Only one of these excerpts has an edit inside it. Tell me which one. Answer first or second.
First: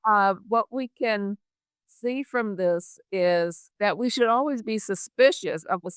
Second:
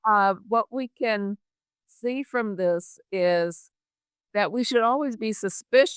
first